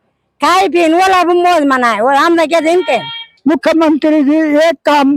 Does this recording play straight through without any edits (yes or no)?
no